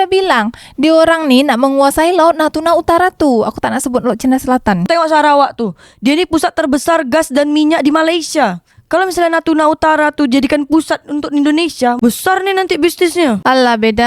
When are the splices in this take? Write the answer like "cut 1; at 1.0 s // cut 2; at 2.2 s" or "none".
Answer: cut 1; at 4.8 s